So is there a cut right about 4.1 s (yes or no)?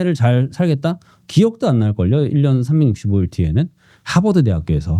yes